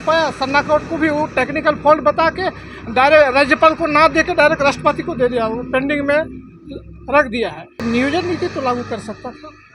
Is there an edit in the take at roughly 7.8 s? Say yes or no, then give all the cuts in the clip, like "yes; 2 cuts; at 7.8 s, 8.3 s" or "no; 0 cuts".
yes; 1 cut; at 7.8 s